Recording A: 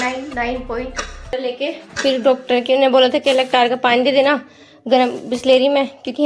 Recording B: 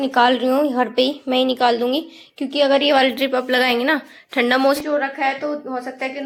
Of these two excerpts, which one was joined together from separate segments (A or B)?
A